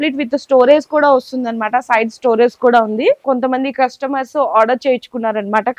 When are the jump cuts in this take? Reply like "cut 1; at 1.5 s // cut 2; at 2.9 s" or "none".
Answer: cut 1; at 3.2 s